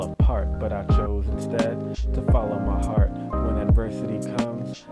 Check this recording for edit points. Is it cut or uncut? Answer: uncut